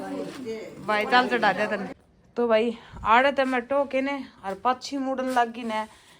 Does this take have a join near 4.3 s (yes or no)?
no